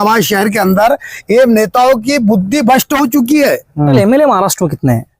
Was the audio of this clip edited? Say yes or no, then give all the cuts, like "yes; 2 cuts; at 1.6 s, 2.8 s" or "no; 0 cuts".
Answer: yes; 1 cut; at 4.0 s